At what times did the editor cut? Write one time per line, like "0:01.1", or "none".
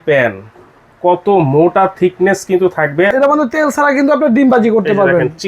0:03.1